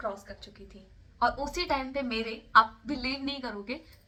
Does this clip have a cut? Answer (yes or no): no